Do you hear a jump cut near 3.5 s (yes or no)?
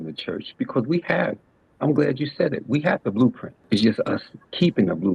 yes